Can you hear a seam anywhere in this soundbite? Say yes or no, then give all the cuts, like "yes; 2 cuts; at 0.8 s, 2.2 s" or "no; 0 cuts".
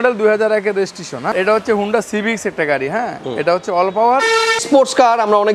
yes; 2 cuts; at 1.3 s, 4.6 s